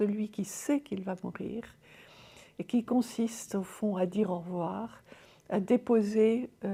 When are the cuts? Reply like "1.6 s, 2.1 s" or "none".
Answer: none